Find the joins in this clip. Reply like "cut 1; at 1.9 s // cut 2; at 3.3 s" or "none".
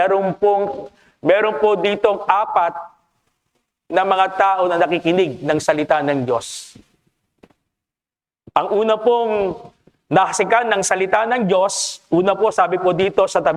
none

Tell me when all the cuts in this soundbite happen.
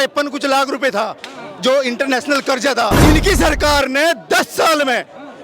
cut 1; at 2.9 s

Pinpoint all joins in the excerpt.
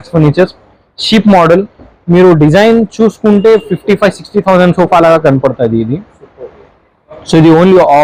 none

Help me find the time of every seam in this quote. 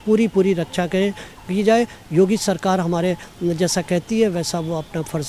none

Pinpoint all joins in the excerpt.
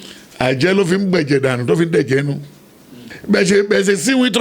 cut 1; at 3.1 s

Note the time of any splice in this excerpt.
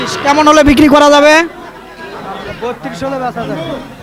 none

